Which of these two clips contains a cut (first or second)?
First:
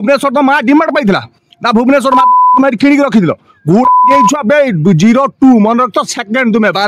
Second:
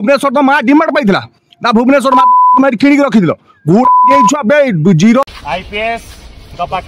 second